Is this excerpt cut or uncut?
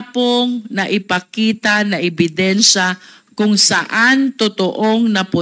uncut